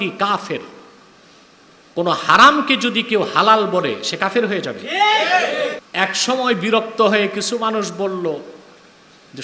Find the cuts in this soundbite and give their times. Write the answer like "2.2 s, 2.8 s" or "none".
5.8 s